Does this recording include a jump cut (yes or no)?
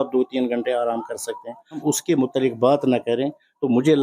yes